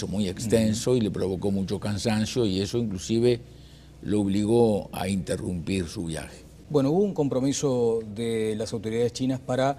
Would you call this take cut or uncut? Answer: cut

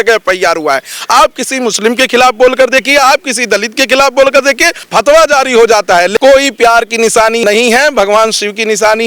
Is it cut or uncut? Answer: cut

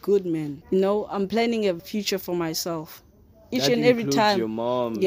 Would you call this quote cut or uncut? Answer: cut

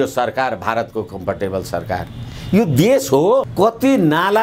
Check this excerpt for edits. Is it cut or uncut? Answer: cut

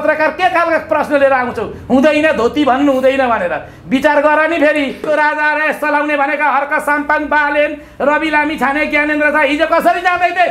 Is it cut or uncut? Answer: cut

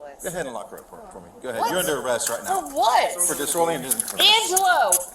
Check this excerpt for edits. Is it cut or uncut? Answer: cut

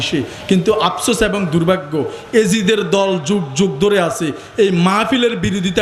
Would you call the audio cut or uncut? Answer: uncut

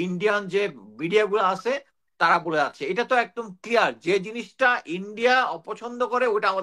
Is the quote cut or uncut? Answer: uncut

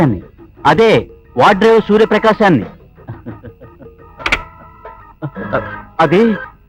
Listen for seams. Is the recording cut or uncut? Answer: uncut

